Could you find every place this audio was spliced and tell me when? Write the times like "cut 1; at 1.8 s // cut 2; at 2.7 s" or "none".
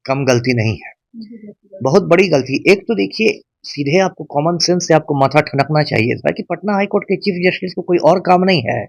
none